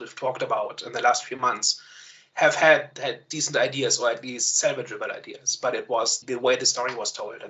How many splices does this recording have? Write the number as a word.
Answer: one